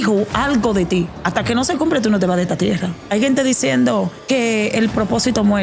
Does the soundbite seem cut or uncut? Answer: cut